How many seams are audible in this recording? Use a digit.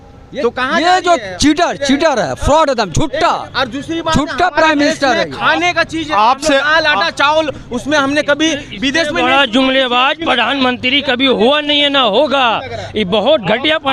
0